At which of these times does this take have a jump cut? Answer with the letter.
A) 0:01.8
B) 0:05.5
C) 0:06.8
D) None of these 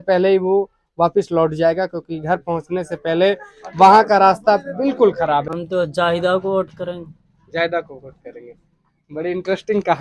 B